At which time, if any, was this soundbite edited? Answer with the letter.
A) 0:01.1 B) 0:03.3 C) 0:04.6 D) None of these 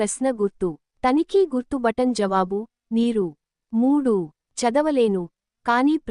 A